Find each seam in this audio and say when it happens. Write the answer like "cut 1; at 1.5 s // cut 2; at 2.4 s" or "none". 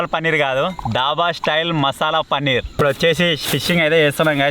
cut 1; at 2.8 s